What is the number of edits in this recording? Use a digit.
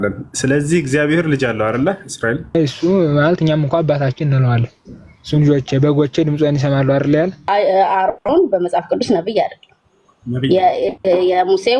2